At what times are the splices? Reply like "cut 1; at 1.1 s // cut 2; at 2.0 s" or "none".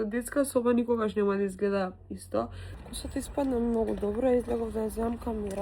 cut 1; at 2.7 s